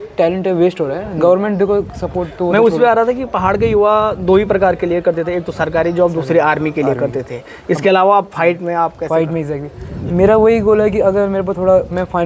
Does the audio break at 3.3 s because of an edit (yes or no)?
no